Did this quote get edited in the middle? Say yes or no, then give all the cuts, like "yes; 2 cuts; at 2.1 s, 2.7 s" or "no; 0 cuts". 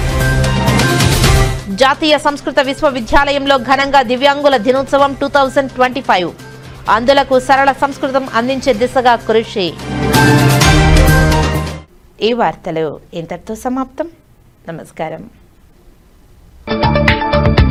no; 0 cuts